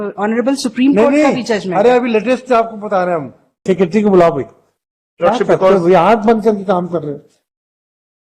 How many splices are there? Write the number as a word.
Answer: one